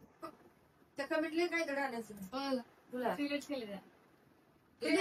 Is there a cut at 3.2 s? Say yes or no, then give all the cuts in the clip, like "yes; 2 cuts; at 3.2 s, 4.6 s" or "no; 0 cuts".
no; 0 cuts